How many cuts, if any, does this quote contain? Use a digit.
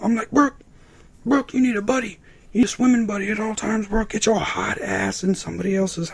1